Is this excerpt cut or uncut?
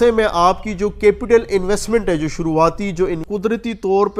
cut